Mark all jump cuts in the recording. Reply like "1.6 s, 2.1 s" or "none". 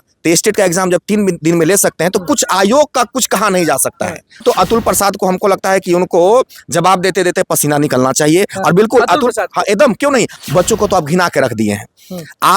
4.4 s, 10.4 s